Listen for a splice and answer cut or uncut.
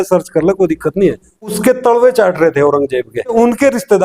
cut